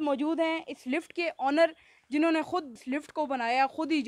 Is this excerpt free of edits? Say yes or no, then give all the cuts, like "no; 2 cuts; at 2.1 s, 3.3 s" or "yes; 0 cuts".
yes; 0 cuts